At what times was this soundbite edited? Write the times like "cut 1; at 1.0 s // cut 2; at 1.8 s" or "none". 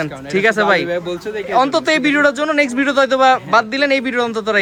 none